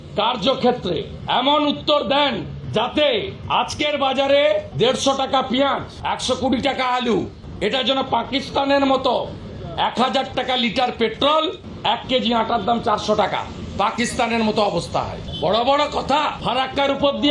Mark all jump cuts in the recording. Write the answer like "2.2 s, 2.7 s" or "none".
1.1 s, 2.6 s, 3.4 s, 4.7 s, 5.9 s, 7.4 s, 11.7 s, 15.2 s, 16.4 s